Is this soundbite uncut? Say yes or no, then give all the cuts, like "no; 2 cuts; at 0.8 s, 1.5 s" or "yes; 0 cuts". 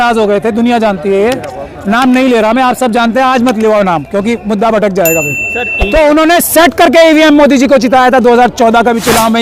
yes; 0 cuts